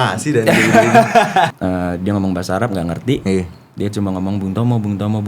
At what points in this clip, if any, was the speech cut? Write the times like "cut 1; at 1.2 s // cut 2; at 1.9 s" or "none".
cut 1; at 1.5 s